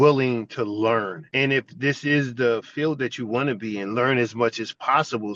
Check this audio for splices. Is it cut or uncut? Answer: cut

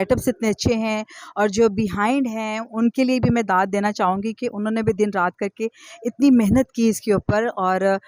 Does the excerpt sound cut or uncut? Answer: uncut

